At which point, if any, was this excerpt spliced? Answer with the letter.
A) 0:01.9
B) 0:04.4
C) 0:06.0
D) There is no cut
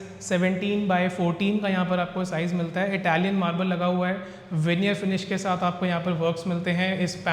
D